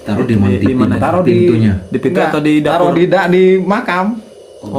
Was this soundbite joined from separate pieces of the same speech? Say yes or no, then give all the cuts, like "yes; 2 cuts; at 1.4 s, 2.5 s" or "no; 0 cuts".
no; 0 cuts